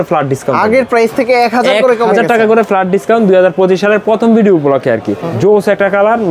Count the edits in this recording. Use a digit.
1